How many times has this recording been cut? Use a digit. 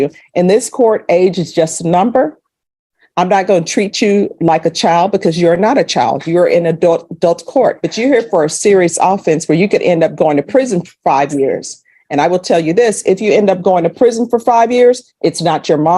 1